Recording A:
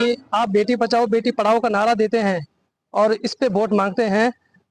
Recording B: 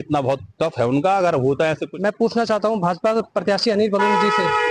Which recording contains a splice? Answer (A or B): B